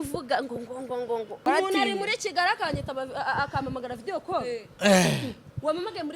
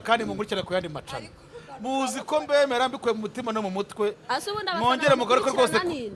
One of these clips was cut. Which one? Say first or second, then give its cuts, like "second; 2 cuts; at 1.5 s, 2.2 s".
first; 1 cut; at 1.4 s